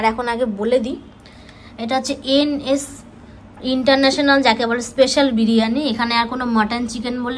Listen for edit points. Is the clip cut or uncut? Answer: uncut